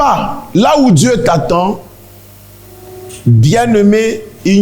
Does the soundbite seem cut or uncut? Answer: uncut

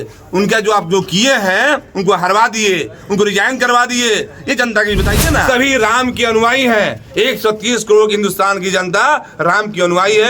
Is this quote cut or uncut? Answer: cut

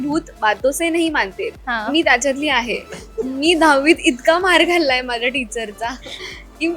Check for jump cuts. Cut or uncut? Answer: uncut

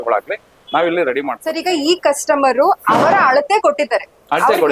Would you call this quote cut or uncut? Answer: cut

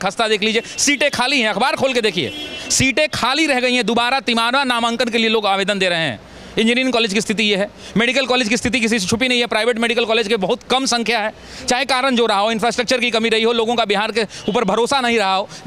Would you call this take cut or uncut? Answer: uncut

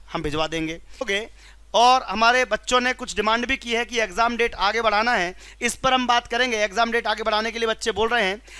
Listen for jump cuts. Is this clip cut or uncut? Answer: cut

